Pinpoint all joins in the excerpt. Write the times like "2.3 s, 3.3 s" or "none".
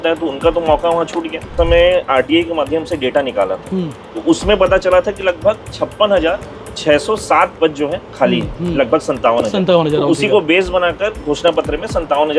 1.5 s